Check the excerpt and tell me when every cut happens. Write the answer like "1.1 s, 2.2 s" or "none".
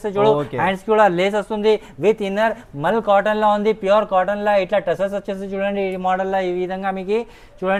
none